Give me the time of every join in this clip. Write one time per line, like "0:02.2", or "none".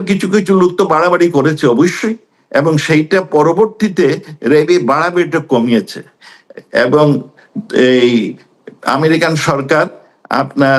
none